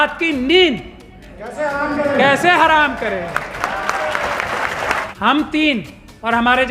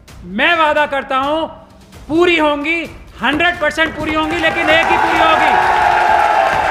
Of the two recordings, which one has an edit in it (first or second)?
first